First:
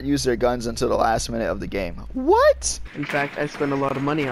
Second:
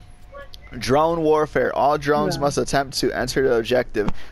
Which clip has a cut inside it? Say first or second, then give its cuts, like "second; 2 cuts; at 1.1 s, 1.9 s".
first; 1 cut; at 2.8 s